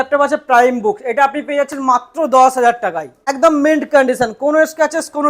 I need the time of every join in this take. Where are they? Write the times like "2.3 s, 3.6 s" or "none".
3.2 s